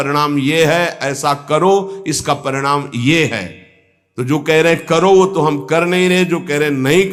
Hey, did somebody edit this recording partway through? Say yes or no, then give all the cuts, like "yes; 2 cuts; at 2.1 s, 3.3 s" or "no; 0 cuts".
no; 0 cuts